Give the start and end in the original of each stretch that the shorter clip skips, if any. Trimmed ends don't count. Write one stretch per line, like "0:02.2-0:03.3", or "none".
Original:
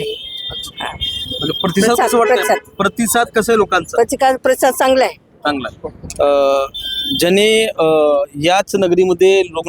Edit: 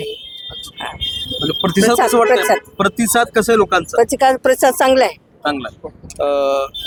none